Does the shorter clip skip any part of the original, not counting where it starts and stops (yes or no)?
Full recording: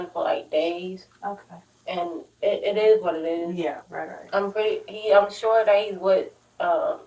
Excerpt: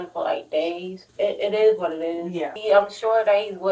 yes